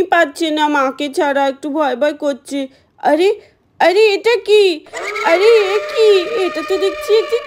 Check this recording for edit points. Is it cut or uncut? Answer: uncut